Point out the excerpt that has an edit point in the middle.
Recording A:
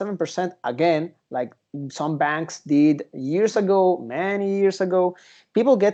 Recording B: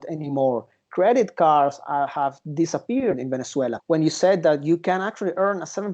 B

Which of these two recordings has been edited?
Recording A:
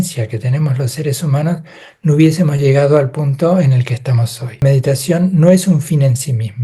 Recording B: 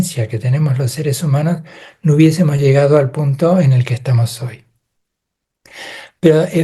A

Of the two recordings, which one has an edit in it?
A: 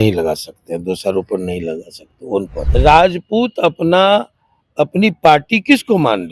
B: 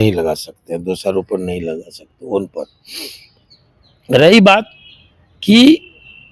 A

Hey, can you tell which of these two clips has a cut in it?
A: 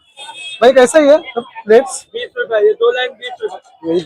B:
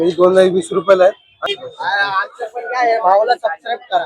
B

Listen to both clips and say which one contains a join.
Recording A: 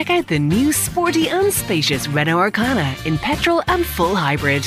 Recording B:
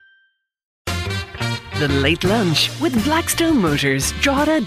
B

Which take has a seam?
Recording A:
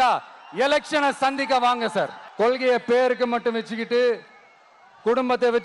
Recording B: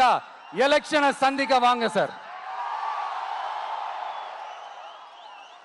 A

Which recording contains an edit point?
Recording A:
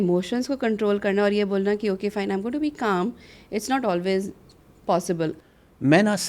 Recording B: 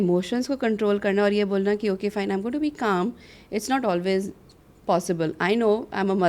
A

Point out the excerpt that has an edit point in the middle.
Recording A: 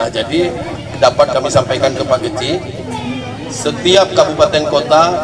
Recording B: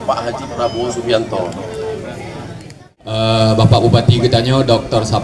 B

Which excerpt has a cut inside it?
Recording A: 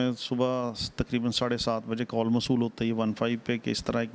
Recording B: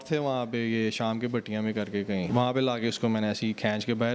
B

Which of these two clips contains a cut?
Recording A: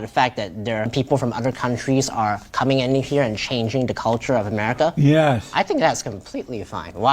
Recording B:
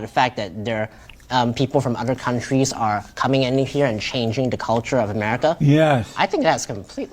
A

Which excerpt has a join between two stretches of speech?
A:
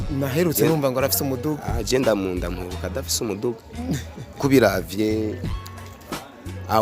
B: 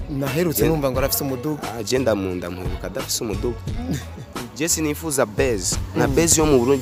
A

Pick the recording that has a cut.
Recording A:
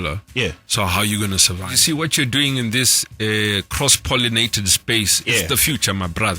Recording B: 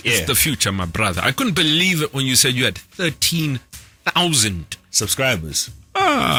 A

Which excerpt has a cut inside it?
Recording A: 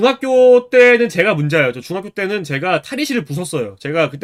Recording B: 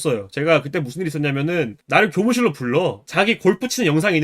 B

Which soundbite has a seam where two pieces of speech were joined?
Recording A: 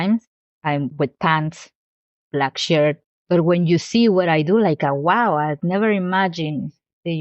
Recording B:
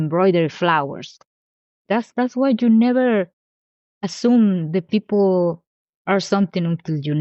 A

